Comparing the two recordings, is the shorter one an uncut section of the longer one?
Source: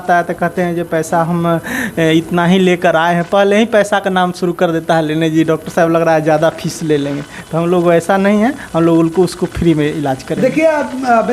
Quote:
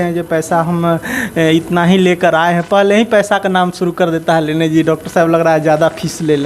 yes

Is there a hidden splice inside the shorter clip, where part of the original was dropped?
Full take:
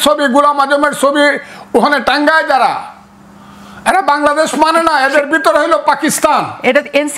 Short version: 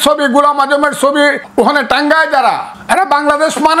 yes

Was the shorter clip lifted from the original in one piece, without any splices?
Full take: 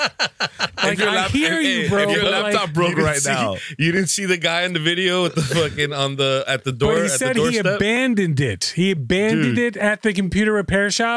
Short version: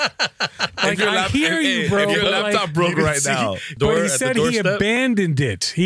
no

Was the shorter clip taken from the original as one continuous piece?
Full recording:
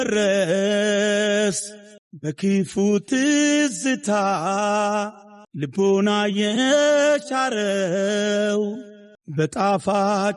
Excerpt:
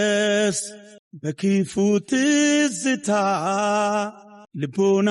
yes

